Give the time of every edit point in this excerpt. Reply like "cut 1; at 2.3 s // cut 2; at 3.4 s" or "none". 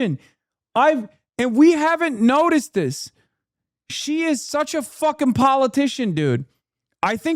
none